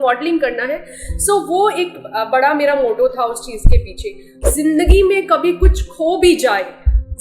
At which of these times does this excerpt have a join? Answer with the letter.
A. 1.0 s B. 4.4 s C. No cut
B